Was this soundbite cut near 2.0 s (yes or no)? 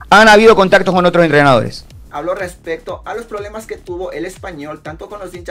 yes